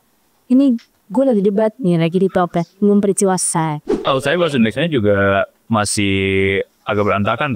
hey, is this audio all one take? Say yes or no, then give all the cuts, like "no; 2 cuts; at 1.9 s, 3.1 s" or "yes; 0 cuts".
no; 1 cut; at 3.9 s